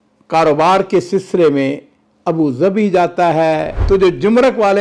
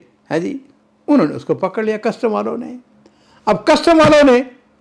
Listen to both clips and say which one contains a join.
first; 1 cut; at 3.7 s

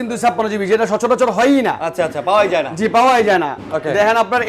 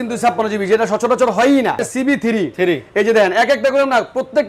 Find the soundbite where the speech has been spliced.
second; 1 cut; at 1.8 s

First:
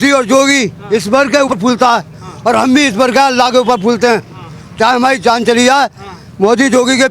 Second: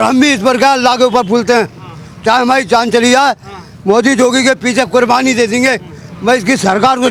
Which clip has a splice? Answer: first; 1 cut; at 1.5 s

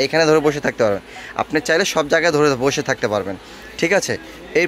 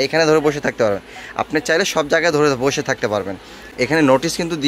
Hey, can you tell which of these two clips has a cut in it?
second; 1 cut; at 3.7 s

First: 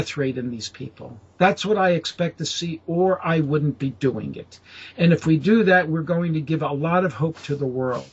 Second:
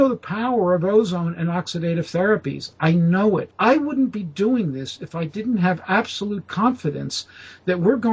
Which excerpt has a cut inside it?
second; 1 cut; at 3.5 s

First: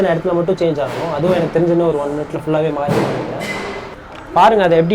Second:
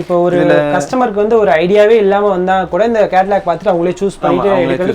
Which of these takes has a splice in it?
first; 1 cut; at 3.9 s

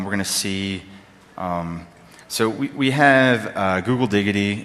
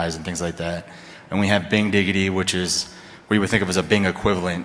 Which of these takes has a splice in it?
second; 1 cut; at 3.0 s

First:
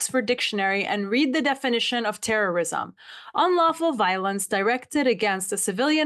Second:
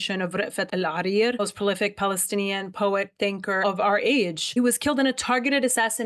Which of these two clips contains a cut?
second; 2 cuts; at 1.4 s, 3.6 s

